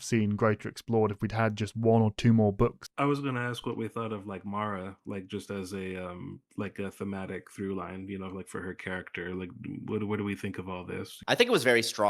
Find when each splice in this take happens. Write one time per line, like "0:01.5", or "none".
0:02.8
0:11.2